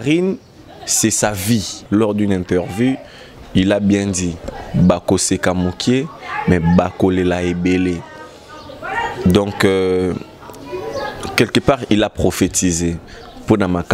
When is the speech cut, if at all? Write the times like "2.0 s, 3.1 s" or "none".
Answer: 1.8 s